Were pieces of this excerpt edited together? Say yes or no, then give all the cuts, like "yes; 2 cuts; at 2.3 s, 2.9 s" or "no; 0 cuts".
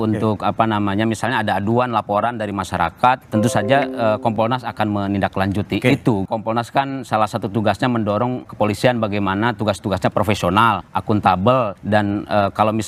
no; 0 cuts